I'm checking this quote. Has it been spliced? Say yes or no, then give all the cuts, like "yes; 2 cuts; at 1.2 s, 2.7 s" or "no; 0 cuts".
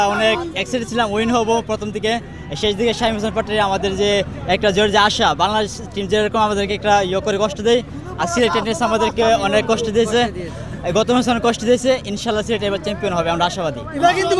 no; 0 cuts